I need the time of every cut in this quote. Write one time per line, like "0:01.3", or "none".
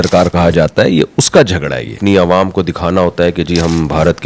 0:02.0